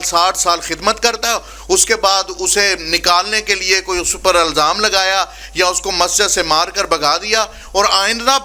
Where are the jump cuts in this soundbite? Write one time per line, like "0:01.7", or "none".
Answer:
none